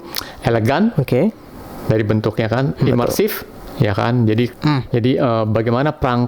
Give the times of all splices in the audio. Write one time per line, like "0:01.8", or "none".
0:04.5